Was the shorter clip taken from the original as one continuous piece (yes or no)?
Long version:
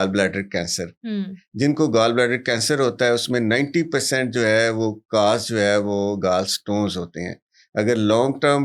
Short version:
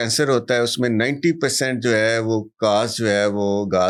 yes